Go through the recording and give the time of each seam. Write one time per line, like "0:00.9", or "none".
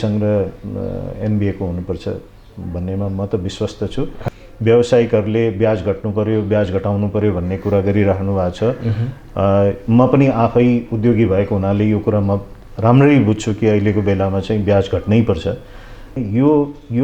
0:04.2
0:16.2